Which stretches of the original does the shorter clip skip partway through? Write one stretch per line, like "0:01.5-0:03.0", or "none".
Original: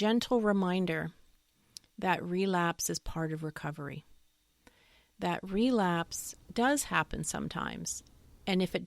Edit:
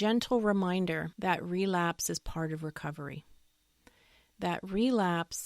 0:01.1-0:01.9

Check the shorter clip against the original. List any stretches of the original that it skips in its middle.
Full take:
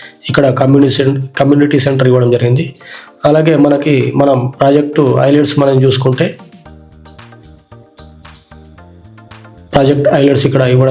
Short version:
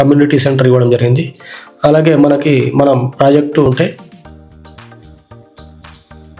0:05.1-0:06.1

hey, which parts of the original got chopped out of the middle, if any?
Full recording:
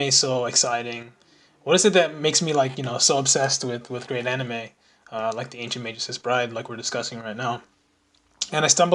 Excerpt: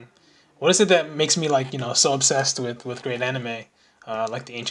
none

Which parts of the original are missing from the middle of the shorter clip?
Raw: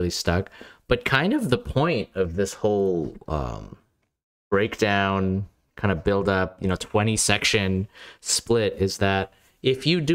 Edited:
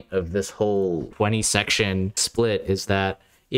0:03.1-0:06.8
0:07.9-0:08.3

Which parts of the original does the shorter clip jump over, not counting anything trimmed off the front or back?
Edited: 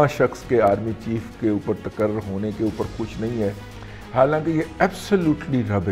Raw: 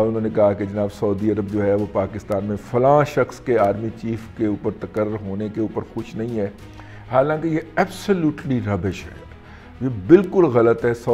none

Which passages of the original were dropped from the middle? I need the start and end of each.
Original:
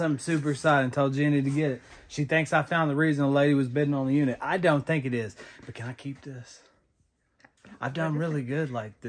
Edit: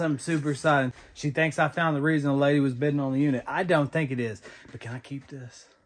0:00.9-0:01.9

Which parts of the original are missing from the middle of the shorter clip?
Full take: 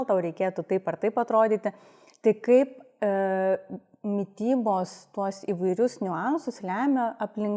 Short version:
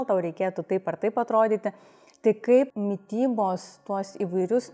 0:02.7-0:04.0

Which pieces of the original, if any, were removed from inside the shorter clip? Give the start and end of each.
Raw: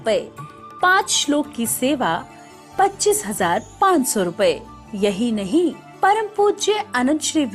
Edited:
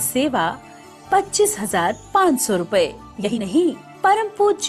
0:05.0-0:05.3

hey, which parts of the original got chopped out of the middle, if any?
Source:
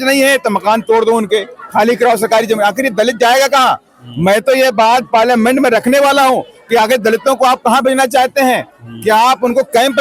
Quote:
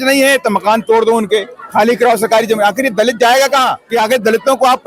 0:03.8-0:06.6

